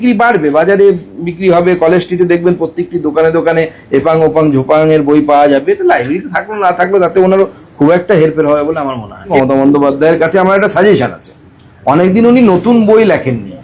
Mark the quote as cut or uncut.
cut